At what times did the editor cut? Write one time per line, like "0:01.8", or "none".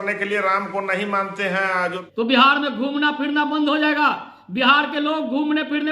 0:02.0